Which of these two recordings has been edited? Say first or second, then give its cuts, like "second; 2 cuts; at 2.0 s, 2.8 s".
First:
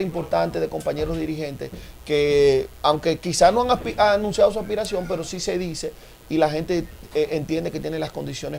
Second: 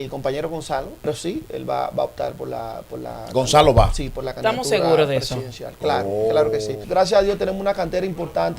second; 2 cuts; at 1.0 s, 6.8 s